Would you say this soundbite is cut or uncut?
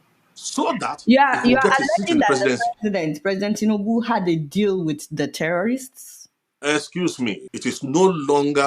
cut